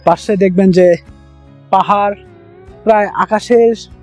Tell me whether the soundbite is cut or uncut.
uncut